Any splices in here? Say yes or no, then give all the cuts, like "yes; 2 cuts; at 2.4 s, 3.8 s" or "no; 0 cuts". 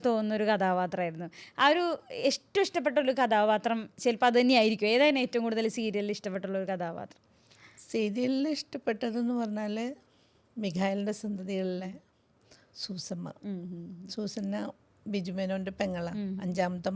no; 0 cuts